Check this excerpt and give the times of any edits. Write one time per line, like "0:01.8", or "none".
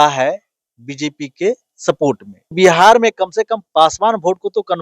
0:02.5

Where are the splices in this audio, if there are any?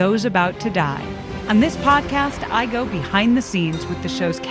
0:01.3

